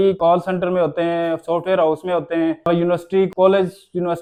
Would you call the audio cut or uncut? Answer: uncut